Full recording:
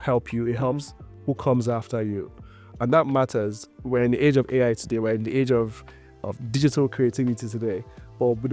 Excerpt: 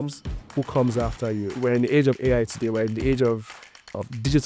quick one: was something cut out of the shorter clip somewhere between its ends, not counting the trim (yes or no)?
yes